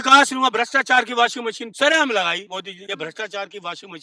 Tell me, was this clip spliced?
yes; 2 cuts; at 1.7 s, 2.6 s

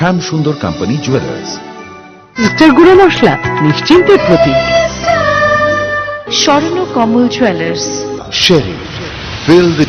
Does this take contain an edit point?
no; 0 cuts

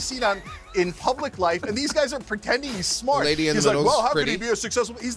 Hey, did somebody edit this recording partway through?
no; 0 cuts

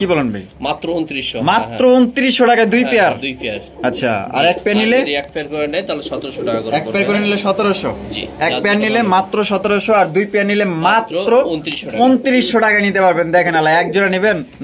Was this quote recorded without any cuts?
yes; 0 cuts

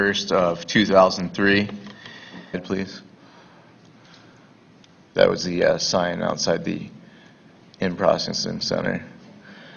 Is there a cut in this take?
no; 0 cuts

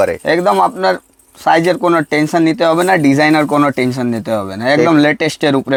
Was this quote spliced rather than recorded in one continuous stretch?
no; 0 cuts

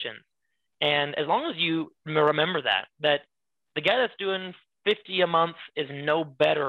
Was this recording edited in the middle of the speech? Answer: no; 0 cuts

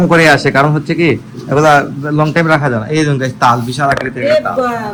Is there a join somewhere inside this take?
no; 0 cuts

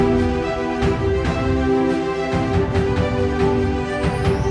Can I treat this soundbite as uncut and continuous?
no; 1 cut; at 2.4 s

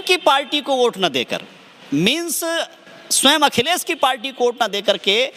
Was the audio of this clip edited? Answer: no; 0 cuts

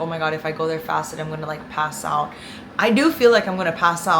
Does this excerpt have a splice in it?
no; 0 cuts

